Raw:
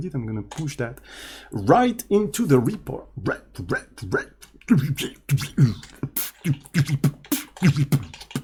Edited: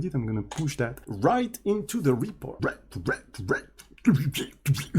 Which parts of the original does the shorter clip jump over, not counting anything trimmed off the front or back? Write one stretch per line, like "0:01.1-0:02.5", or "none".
0:01.0-0:01.5
0:03.0-0:03.2